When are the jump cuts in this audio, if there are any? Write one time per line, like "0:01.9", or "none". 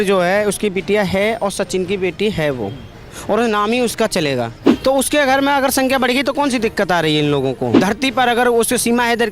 0:04.6
0:07.8